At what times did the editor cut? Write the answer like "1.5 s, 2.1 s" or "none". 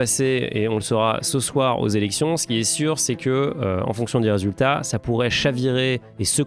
none